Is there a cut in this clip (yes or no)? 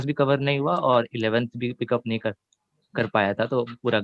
no